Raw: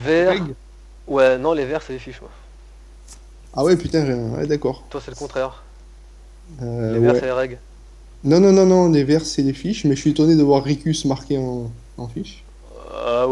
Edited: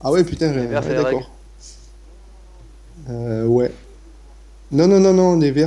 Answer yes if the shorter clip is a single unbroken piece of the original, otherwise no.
yes